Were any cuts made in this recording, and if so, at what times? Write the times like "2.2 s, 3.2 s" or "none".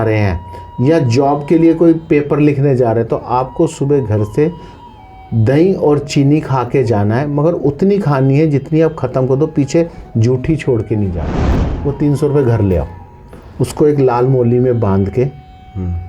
11.4 s